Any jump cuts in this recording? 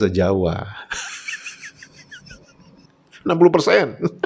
no; 0 cuts

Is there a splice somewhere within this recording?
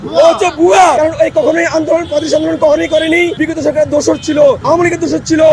yes; 3 cuts; at 1.0 s, 3.4 s, 4.6 s

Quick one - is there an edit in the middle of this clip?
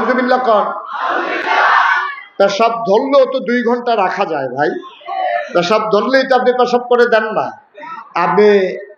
no; 0 cuts

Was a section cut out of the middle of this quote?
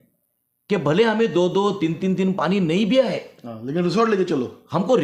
no; 0 cuts

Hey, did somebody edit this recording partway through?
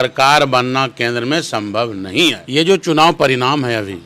yes; 1 cut; at 2.4 s

